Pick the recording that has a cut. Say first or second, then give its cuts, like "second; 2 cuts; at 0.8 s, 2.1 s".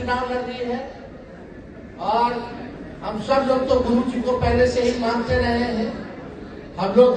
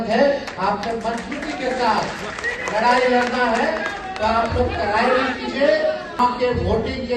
second; 1 cut; at 6.2 s